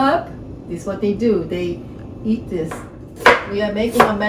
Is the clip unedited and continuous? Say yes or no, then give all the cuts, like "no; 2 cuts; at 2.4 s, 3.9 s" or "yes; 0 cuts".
no; 1 cut; at 3.0 s